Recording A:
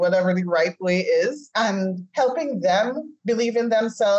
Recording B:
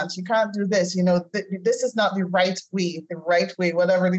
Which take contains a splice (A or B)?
A